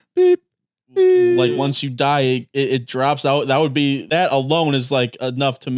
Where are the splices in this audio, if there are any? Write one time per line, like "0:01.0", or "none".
0:01.5
0:04.0